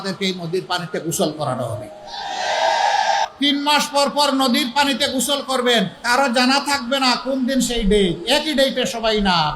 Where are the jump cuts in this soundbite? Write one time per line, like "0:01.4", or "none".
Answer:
0:03.2
0:06.0